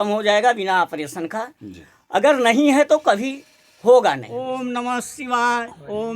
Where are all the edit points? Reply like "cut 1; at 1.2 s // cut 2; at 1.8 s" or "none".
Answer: cut 1; at 4.3 s